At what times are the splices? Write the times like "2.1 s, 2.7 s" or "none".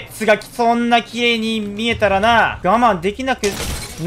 2.6 s